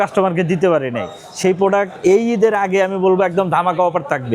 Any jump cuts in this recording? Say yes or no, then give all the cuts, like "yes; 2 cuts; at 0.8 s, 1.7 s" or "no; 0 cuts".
no; 0 cuts